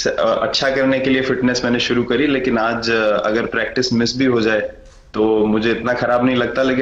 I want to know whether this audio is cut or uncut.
uncut